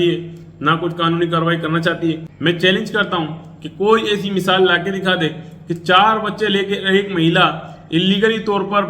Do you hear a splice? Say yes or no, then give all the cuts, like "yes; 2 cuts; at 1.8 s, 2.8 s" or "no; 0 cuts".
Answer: yes; 1 cut; at 2.3 s